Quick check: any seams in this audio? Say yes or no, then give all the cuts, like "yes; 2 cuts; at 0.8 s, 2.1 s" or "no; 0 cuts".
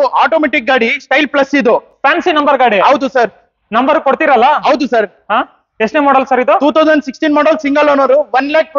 no; 0 cuts